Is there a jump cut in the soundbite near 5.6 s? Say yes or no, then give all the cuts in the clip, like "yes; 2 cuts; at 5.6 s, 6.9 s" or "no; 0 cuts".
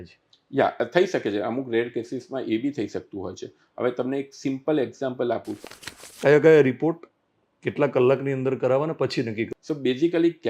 yes; 2 cuts; at 5.6 s, 9.5 s